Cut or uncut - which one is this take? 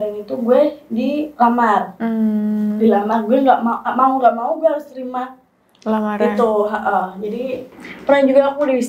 cut